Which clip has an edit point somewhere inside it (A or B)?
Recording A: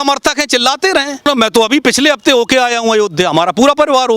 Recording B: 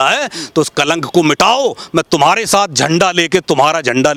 A